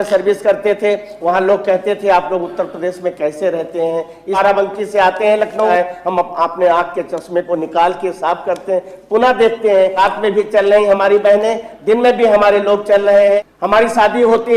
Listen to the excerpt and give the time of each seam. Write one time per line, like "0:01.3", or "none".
0:04.4
0:05.7
0:10.0
0:13.5

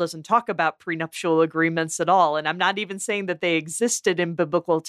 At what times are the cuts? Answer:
none

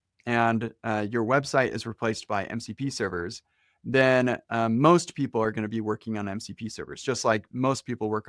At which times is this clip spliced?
none

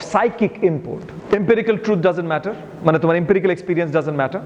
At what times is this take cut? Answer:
0:01.2

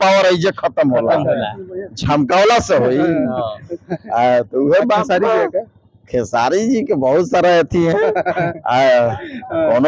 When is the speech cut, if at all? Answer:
none

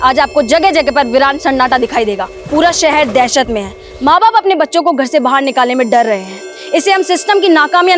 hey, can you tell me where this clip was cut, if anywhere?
0:02.3

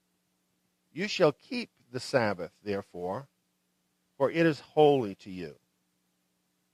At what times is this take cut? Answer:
0:02.0

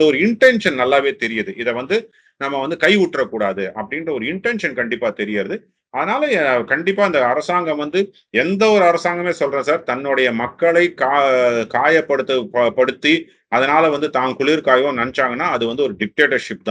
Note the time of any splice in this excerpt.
none

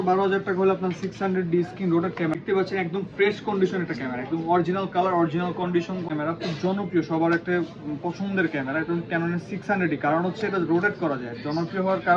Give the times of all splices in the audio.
0:02.4
0:06.1

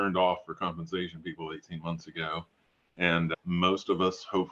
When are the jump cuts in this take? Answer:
none

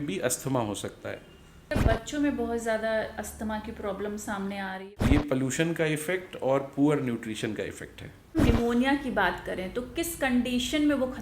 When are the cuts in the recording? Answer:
0:01.7
0:04.7
0:08.4

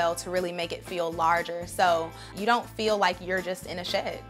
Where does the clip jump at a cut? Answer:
0:02.2

